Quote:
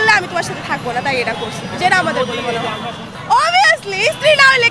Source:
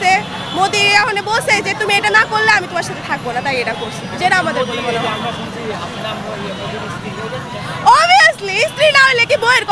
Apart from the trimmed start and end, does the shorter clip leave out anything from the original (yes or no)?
yes